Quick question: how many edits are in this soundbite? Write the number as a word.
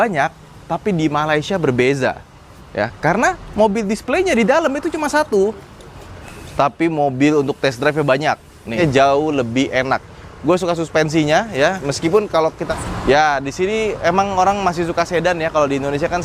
two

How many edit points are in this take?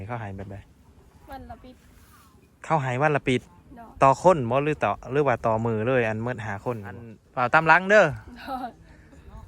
one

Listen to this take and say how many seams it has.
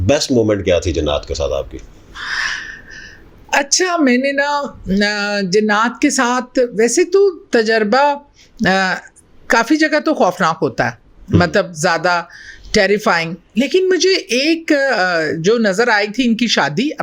zero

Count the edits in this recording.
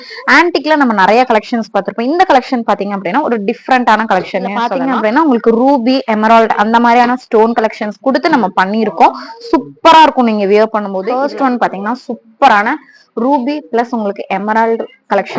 two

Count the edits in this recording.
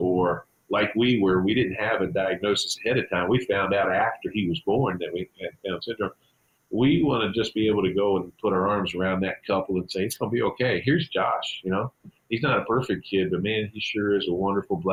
zero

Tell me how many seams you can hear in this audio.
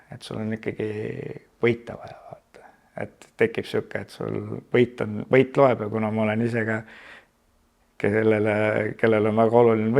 zero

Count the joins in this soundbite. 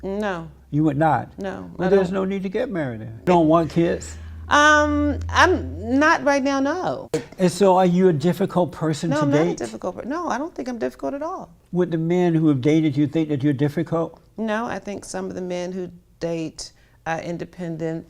three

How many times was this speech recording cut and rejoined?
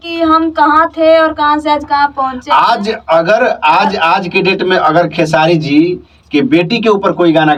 zero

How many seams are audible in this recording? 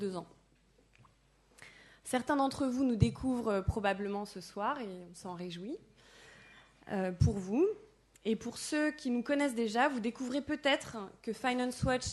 one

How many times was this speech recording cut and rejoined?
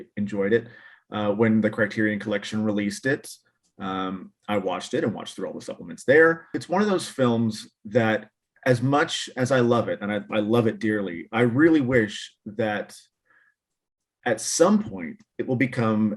one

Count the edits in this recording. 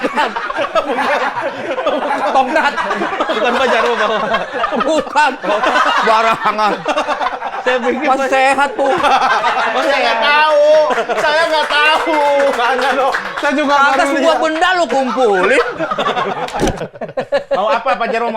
one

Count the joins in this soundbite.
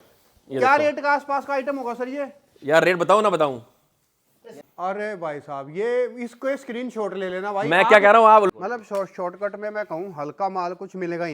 two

